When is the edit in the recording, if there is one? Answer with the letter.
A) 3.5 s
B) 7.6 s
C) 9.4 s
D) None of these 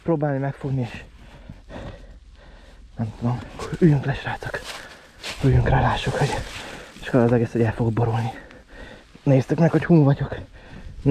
A